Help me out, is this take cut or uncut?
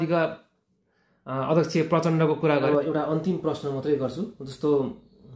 cut